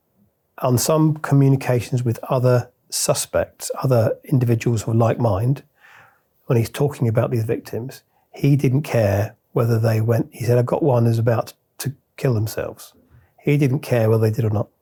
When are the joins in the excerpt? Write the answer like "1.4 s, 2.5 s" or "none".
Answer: none